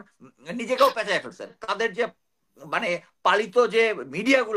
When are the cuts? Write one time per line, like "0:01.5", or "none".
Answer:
0:01.6